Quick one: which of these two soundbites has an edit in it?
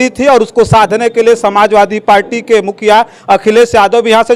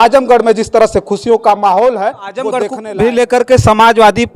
second; 1 cut; at 2.6 s

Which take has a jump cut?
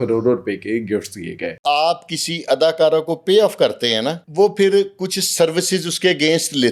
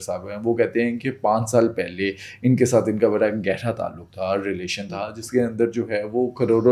first; 2 cuts; at 1.6 s, 4.2 s

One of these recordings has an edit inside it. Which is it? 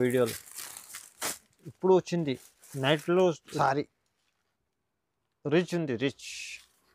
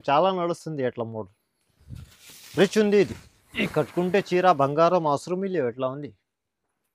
first; 1 cut; at 3.5 s

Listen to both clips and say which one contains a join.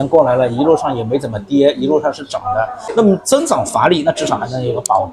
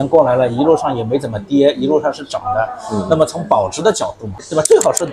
first; 1 cut; at 2.8 s

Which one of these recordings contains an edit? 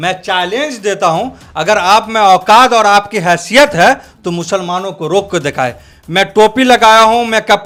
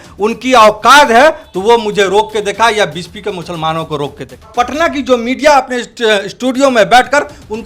second; 1 cut; at 4.5 s

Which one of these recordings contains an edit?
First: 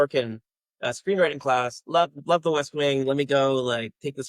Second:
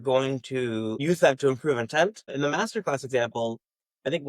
second; 2 cuts; at 1.0 s, 2.3 s

